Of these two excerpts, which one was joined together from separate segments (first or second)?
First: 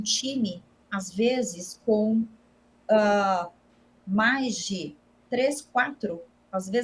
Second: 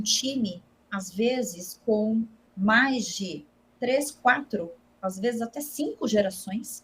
second